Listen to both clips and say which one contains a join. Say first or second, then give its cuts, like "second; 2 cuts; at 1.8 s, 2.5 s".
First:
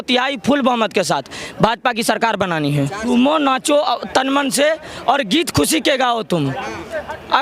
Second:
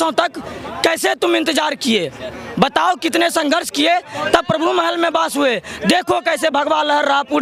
first; 1 cut; at 3.0 s